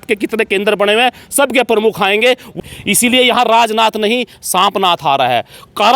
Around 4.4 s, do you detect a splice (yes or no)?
no